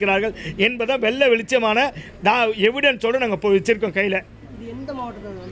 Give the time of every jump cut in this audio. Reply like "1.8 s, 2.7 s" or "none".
none